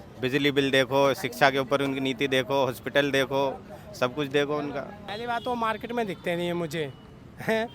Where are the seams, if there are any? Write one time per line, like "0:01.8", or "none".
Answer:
0:05.1